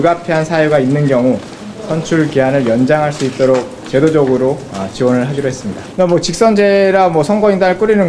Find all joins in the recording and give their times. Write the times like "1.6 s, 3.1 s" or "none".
5.8 s